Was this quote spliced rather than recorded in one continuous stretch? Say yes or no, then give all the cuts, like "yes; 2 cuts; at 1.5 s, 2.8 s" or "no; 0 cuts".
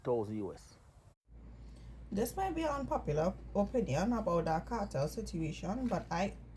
yes; 1 cut; at 1.5 s